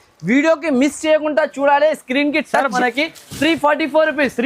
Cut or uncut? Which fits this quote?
cut